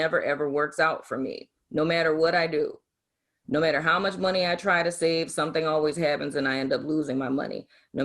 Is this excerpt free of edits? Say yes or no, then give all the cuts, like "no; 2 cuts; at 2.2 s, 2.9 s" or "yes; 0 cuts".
yes; 0 cuts